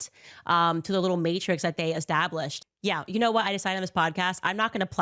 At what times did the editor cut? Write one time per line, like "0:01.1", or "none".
0:02.8